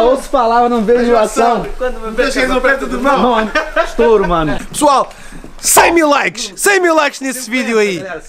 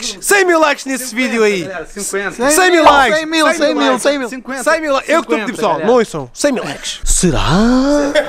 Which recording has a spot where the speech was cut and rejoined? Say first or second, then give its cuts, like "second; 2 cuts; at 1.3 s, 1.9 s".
first; 1 cut; at 4.7 s